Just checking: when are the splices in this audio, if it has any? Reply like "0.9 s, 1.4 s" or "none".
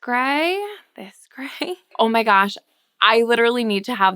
1.9 s